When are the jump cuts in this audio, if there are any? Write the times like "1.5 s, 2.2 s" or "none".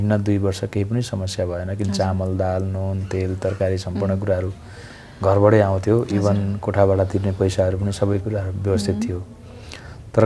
none